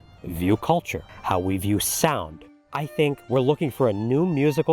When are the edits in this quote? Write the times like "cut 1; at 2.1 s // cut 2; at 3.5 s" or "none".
cut 1; at 2.6 s